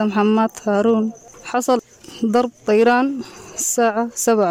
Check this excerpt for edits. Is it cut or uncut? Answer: cut